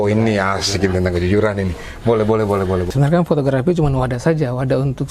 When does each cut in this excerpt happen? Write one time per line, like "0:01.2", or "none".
0:02.9